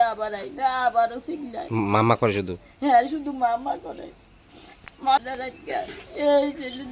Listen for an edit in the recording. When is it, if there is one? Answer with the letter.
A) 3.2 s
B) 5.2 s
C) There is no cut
B